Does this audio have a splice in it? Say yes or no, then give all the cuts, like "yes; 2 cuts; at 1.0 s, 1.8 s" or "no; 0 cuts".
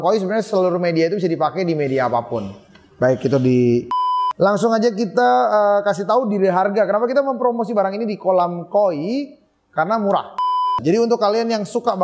yes; 2 cuts; at 4.0 s, 10.4 s